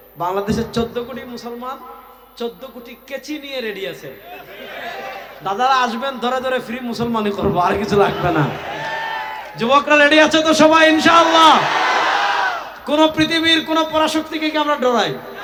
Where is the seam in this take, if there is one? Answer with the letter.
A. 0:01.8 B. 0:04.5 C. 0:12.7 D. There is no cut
D